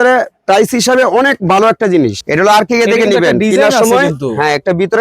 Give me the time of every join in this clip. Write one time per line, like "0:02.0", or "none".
0:02.2